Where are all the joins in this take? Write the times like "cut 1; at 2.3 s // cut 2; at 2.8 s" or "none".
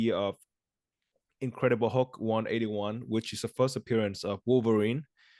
none